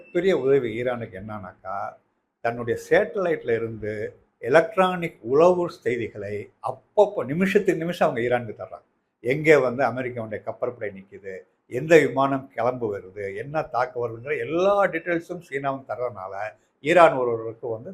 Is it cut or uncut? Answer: uncut